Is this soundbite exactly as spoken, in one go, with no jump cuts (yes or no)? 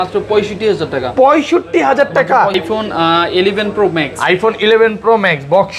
no